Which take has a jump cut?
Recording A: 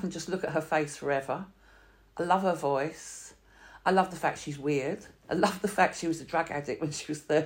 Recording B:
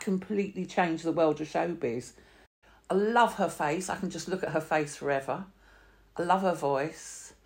B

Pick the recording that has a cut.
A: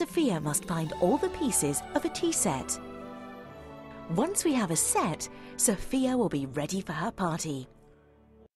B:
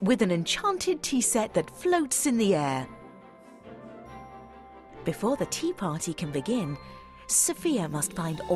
A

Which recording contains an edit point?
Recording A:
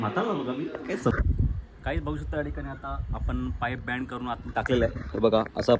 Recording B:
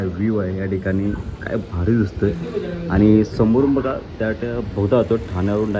A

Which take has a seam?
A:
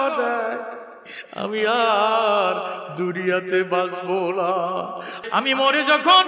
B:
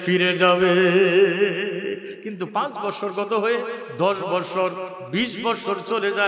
A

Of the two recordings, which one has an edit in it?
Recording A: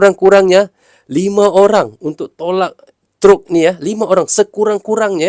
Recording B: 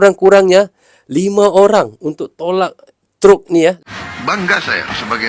B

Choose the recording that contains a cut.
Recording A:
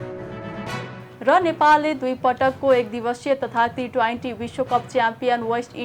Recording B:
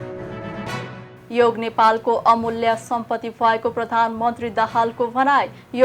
B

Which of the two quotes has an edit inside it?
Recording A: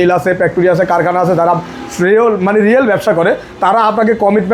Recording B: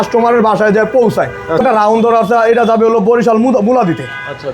B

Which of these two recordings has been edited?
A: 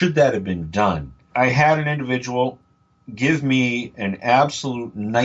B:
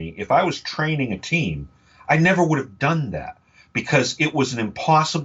A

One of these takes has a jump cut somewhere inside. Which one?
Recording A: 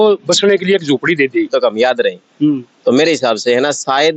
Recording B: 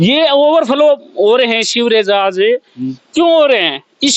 A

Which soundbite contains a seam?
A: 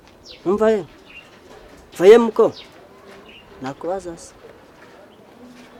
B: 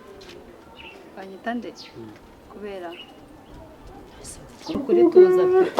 B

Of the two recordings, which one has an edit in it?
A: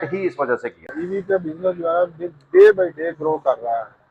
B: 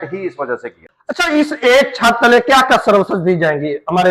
A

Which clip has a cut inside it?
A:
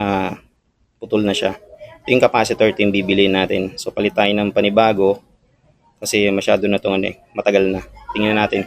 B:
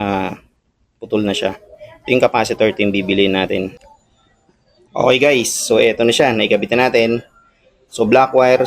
B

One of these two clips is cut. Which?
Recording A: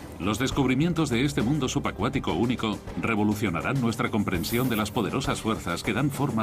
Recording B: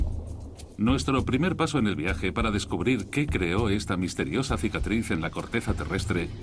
B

